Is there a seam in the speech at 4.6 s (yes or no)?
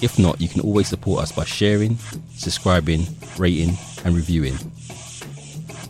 yes